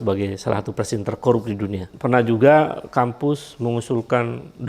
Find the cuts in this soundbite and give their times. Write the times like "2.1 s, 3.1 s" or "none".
1.9 s